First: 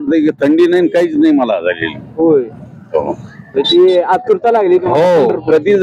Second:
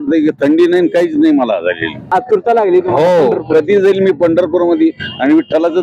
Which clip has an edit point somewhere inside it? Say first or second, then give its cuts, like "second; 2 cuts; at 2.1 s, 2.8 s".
second; 1 cut; at 2.1 s